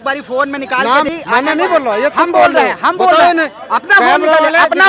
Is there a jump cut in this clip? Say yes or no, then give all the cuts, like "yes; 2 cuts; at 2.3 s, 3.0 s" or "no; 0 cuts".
yes; 1 cut; at 1.1 s